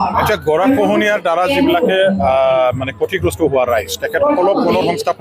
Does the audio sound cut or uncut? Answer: uncut